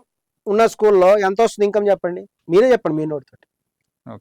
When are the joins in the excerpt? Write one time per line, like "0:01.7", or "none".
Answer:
0:02.3